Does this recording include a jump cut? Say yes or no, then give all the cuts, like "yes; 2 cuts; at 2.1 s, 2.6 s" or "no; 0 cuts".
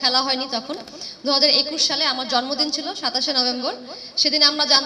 no; 0 cuts